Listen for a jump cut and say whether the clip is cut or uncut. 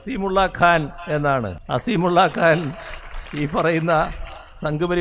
cut